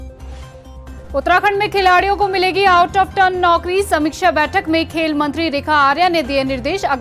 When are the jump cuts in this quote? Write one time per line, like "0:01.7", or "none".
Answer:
0:01.0

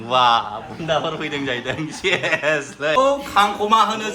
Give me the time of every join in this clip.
0:03.0

